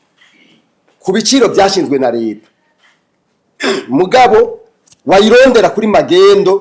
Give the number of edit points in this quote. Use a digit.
0